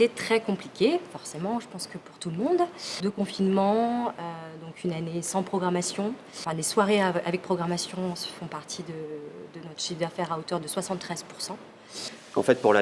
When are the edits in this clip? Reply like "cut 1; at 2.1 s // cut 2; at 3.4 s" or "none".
none